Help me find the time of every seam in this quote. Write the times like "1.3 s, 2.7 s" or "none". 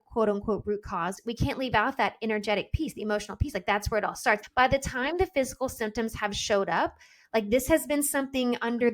1.2 s, 4.4 s